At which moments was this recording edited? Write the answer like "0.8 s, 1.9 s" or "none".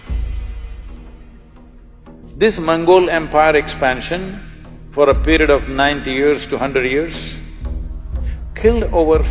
2.2 s